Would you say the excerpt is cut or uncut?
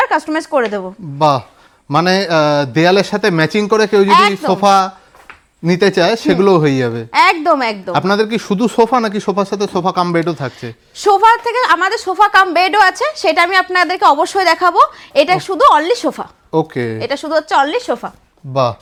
uncut